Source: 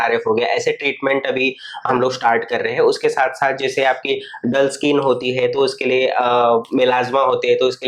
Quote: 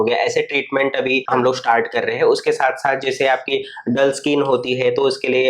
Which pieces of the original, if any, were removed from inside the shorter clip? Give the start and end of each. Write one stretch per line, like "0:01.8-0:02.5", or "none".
0:01.5-0:01.8